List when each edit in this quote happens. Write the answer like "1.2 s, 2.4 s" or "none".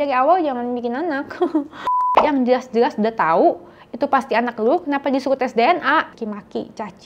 2.1 s, 6.1 s